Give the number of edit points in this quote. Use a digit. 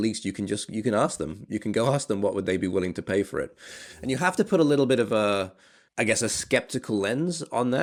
0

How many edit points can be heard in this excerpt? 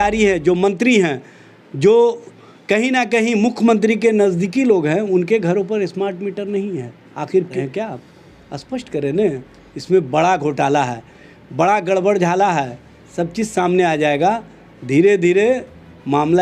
1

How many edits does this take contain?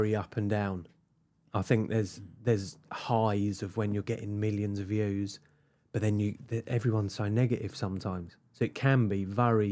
0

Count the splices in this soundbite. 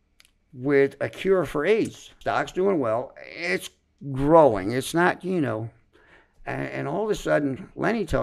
1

